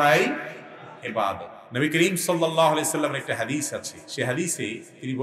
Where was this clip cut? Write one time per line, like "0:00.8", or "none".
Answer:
0:01.6